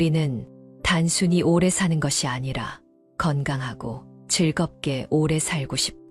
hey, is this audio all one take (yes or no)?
yes